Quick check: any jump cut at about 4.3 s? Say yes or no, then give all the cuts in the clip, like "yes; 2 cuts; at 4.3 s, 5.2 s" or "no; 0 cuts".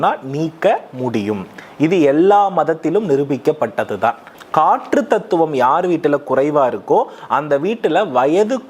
yes; 1 cut; at 4.3 s